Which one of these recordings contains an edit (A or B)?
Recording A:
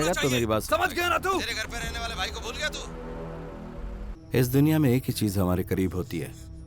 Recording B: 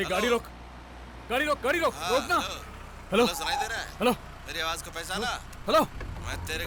A